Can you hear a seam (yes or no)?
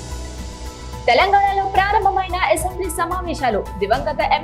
yes